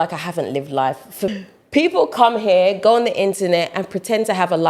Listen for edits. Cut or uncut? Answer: cut